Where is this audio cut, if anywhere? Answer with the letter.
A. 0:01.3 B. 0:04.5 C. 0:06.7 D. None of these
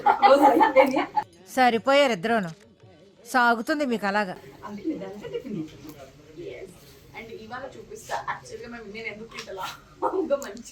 D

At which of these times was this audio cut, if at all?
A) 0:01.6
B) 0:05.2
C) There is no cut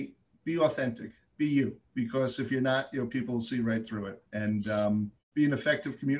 B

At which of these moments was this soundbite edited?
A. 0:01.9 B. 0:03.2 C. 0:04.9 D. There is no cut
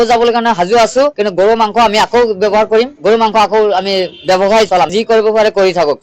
C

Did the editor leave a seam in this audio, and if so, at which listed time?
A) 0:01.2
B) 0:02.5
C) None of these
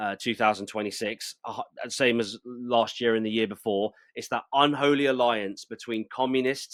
C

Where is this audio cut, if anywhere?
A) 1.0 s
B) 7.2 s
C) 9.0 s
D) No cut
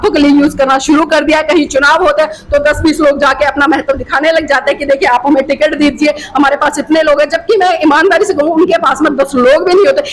D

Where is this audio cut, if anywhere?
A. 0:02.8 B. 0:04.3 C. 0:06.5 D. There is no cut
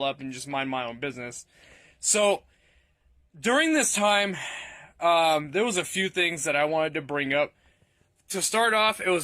B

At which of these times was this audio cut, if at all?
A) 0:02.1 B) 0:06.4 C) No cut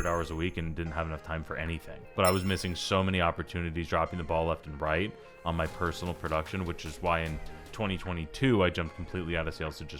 A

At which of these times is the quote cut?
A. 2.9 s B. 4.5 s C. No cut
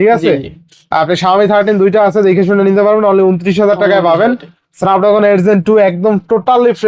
C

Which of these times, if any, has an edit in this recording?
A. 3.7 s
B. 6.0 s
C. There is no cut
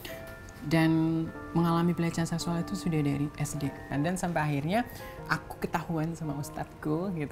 A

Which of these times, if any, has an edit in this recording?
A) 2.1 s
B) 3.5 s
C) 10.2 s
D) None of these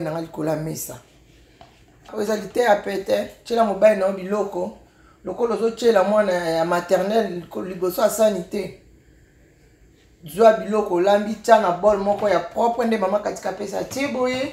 A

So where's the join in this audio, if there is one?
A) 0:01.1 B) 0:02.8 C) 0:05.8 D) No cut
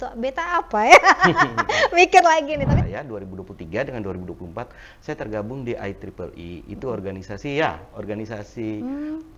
B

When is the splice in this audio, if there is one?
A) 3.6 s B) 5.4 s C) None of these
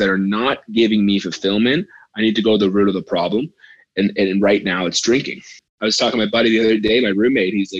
B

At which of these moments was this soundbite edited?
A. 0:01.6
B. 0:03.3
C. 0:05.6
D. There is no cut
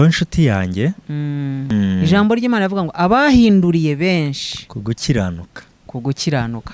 A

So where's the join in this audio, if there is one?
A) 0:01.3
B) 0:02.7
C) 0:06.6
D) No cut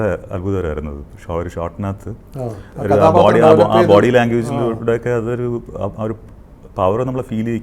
B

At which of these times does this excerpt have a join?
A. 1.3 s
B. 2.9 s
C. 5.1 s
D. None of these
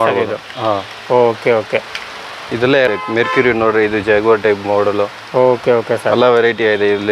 B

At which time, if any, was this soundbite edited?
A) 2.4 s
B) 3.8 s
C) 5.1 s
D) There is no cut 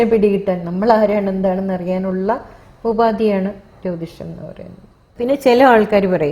C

